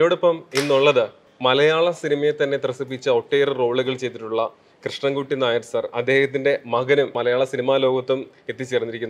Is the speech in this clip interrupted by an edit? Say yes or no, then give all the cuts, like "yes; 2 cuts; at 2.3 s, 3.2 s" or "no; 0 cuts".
yes; 2 cuts; at 1.3 s, 7.2 s